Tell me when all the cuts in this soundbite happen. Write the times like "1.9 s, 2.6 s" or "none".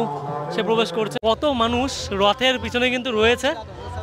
1.2 s